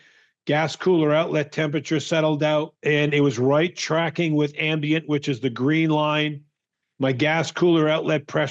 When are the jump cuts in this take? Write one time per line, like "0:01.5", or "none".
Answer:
0:02.7